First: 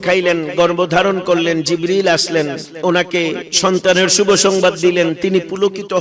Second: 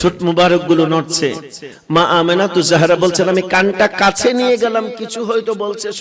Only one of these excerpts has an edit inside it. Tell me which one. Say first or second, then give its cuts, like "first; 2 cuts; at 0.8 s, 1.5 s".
first; 1 cut; at 2.7 s